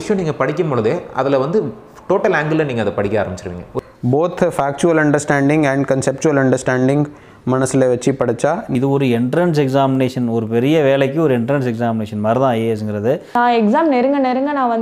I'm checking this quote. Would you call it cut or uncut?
cut